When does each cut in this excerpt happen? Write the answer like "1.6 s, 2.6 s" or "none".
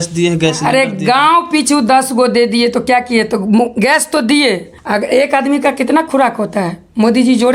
4.7 s